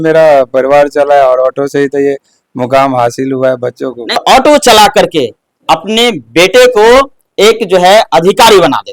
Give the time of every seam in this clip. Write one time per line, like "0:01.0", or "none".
0:04.2

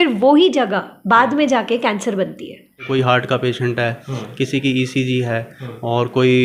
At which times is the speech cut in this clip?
0:02.8

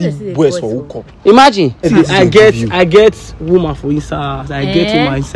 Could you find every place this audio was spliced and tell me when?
0:01.9

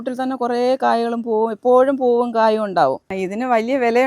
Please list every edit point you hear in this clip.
0:03.1

